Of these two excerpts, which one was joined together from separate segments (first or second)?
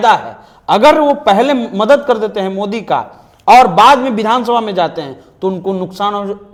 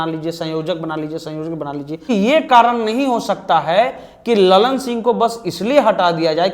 second